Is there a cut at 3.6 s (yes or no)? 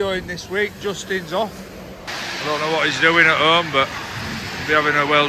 no